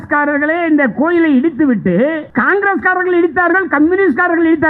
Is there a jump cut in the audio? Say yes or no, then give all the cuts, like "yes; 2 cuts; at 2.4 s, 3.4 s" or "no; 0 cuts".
yes; 1 cut; at 2.2 s